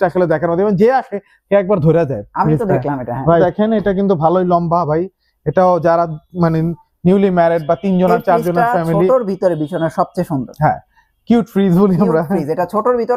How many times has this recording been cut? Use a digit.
1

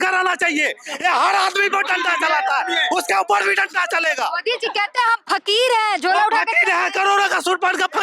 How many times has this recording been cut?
0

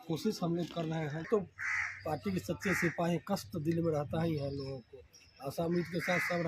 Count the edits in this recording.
1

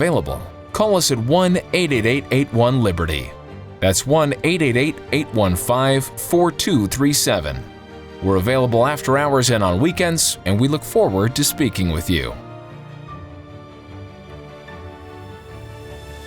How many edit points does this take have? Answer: 1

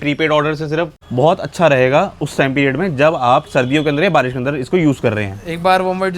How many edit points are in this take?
1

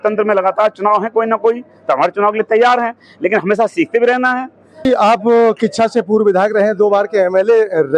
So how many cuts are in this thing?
1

